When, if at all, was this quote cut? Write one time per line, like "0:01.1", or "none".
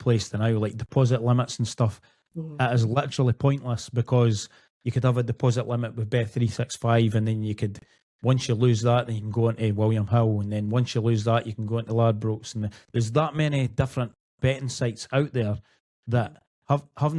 none